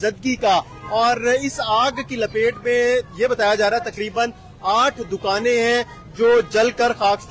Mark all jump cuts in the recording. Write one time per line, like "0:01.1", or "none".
none